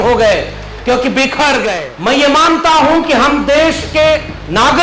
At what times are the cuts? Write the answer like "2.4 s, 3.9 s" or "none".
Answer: 1.9 s

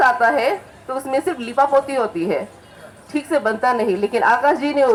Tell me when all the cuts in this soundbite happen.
none

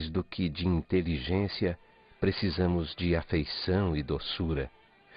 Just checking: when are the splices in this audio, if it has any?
4.0 s

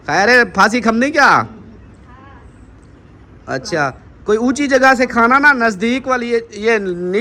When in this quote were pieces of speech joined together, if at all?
none

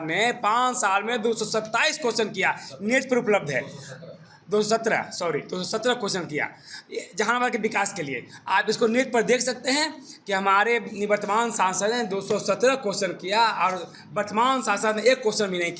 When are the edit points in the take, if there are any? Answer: none

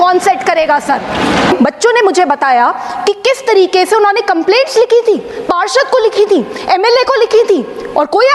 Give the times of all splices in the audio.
1.5 s

